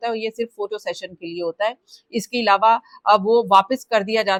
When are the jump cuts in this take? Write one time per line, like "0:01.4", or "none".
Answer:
none